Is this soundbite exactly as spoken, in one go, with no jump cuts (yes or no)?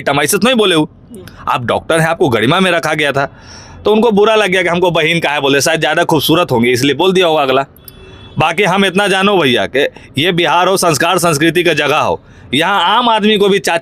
yes